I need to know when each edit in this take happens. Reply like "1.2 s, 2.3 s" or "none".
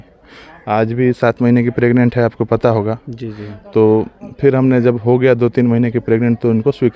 none